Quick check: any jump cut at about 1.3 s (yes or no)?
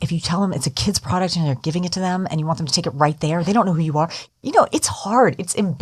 no